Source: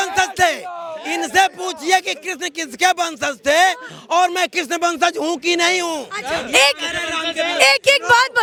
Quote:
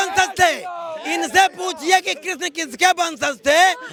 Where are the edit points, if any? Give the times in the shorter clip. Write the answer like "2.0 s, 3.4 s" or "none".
none